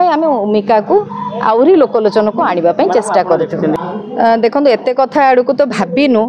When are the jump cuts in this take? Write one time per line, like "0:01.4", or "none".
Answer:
0:03.8